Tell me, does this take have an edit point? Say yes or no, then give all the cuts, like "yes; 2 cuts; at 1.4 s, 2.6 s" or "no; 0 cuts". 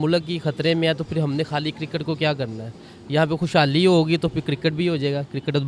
no; 0 cuts